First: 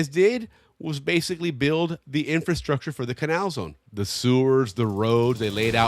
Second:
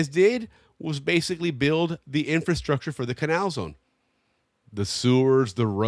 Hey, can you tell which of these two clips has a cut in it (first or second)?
first